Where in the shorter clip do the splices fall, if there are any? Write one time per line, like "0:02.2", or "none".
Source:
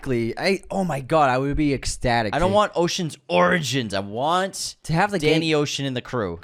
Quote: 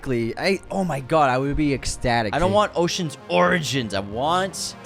none